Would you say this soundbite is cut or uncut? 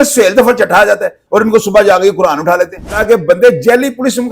cut